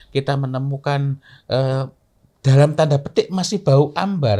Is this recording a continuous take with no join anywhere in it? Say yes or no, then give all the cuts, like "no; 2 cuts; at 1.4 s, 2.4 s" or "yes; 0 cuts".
yes; 0 cuts